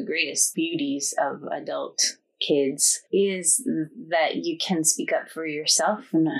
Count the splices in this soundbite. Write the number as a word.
one